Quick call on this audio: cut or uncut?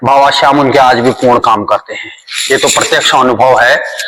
uncut